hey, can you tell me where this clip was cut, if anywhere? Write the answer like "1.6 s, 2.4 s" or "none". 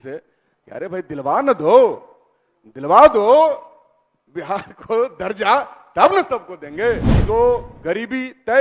7.1 s